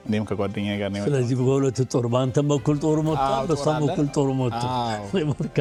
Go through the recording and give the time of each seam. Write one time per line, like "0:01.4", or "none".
none